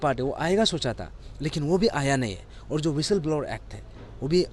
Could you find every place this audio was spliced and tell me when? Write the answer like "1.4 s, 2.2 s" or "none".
none